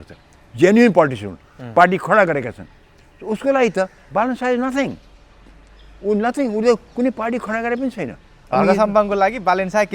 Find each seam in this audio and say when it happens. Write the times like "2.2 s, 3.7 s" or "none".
none